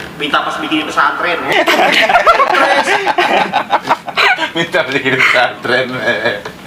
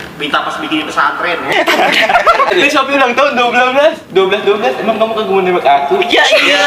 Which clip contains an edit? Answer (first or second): second